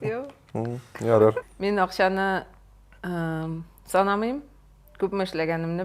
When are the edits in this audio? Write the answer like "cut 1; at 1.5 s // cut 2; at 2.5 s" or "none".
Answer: cut 1; at 1.4 s